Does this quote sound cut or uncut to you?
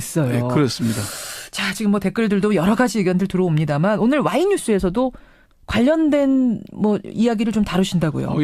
cut